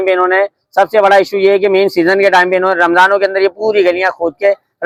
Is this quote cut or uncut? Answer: uncut